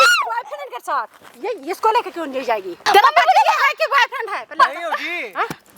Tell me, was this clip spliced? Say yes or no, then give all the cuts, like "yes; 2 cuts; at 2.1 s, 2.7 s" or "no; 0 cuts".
yes; 1 cut; at 2.8 s